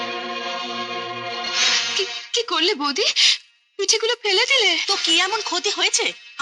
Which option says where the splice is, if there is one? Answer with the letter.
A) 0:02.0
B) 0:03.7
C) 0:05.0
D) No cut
D